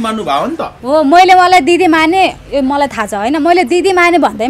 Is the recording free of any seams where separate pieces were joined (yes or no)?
yes